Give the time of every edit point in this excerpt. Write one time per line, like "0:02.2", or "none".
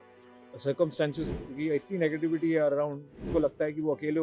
0:01.3
0:03.3